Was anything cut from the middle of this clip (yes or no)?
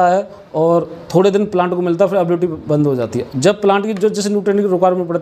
no